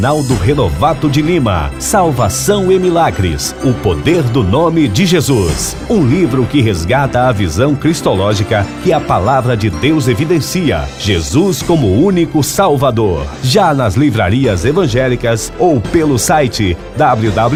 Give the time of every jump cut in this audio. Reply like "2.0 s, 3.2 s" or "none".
none

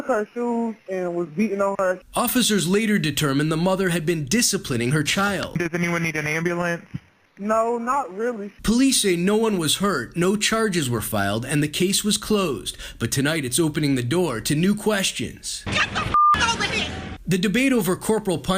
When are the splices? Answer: none

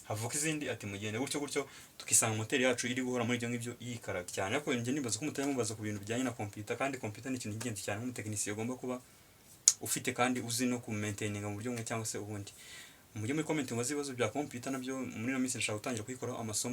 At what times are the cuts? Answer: 4.3 s

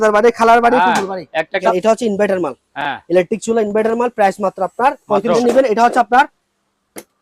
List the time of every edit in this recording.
1.7 s, 5.4 s

